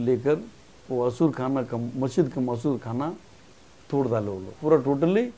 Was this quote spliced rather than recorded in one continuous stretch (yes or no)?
yes